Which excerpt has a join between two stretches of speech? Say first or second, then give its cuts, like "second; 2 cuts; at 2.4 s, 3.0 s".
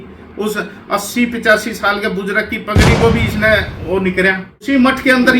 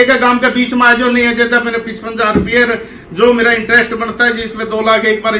first; 1 cut; at 4.5 s